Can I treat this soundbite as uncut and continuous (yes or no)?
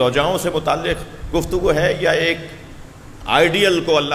yes